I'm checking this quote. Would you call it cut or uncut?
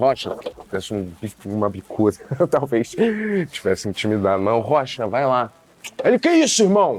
uncut